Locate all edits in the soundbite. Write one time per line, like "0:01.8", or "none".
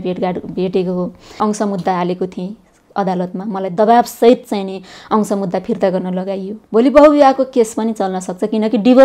0:01.4
0:06.5